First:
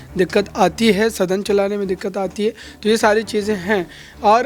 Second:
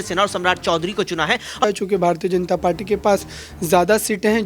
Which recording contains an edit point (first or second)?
second